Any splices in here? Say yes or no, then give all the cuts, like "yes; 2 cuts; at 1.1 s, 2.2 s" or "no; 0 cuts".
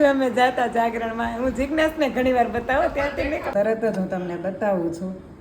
yes; 1 cut; at 3.5 s